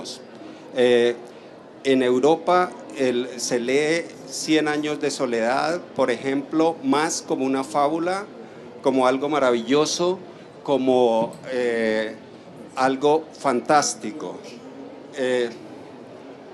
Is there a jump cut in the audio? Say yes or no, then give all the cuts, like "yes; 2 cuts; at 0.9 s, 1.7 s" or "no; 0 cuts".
no; 0 cuts